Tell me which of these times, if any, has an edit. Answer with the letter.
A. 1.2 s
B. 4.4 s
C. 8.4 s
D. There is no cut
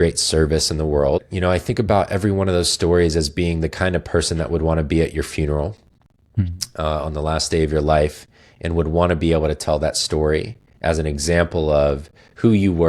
A